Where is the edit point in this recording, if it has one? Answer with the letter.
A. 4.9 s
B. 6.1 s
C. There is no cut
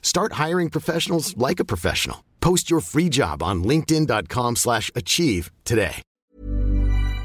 B